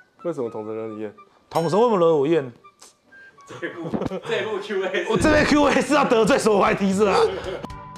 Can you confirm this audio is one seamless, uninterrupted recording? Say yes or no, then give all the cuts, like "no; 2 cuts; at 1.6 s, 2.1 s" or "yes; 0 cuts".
yes; 0 cuts